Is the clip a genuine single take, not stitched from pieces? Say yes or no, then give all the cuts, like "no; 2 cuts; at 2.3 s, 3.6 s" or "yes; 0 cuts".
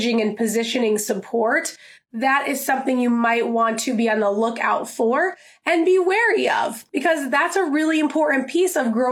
no; 1 cut; at 6.8 s